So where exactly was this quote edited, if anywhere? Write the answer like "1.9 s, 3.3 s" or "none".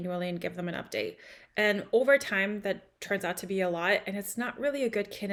none

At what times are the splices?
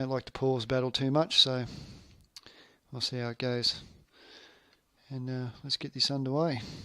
0.9 s

